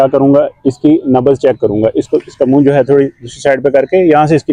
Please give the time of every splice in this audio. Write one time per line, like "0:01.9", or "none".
none